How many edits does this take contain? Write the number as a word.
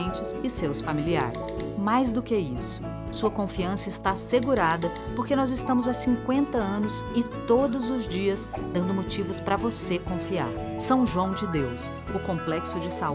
zero